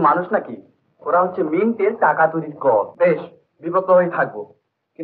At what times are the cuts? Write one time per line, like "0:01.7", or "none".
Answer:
0:02.9